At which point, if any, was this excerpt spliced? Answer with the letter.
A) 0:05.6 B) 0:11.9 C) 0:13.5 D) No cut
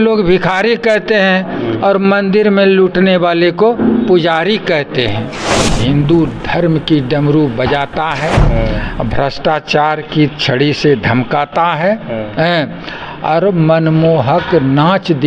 A